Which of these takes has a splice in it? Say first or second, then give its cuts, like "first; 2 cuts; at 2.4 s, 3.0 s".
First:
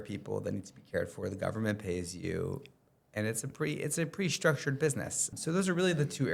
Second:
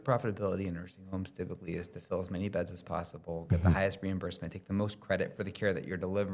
first; 1 cut; at 5.3 s